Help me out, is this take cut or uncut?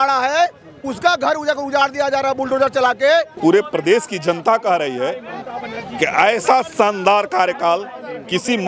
cut